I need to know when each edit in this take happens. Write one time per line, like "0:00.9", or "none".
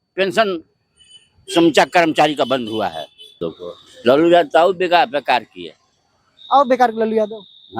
0:03.4